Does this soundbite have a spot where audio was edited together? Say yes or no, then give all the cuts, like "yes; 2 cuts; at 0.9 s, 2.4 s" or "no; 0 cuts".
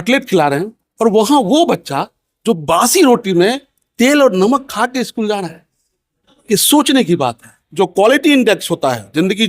yes; 1 cut; at 7.5 s